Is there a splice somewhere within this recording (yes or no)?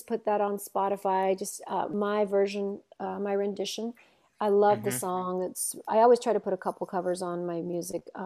no